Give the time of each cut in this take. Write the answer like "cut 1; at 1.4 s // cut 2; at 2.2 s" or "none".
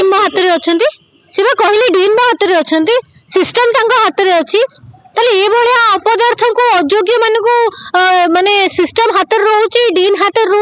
none